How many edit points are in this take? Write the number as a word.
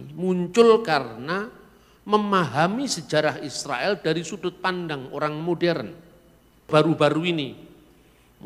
one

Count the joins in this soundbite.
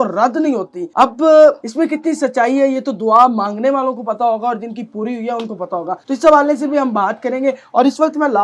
zero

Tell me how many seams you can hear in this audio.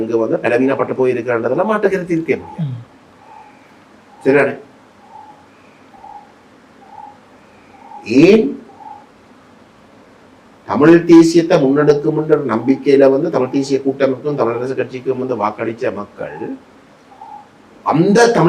zero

